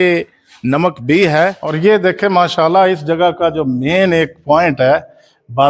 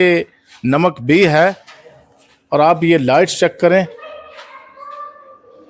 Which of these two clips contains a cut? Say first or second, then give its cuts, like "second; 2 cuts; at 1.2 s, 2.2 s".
first; 1 cut; at 1.6 s